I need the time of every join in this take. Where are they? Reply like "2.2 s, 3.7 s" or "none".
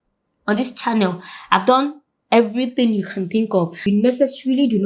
3.9 s